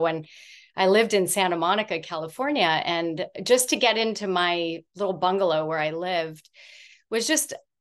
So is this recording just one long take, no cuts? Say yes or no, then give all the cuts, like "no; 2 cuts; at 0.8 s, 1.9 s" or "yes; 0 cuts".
yes; 0 cuts